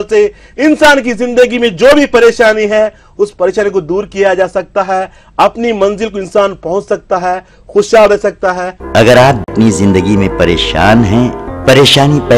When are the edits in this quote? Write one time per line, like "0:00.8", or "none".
0:08.6
0:09.5